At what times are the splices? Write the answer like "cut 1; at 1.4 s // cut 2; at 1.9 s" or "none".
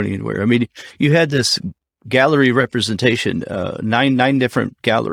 none